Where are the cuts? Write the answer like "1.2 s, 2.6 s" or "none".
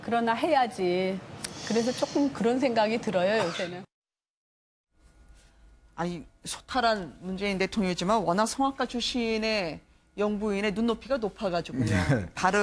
1.8 s